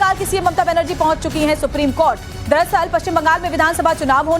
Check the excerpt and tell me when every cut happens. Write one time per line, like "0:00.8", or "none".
0:01.1